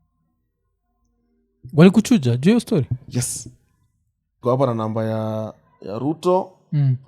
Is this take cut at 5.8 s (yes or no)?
no